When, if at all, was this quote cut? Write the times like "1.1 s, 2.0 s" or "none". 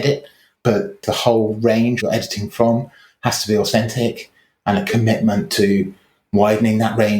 1.0 s, 2.0 s